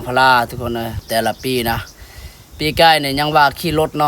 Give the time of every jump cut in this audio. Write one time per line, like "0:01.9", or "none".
0:01.0